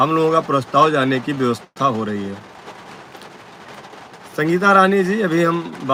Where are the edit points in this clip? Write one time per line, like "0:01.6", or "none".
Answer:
none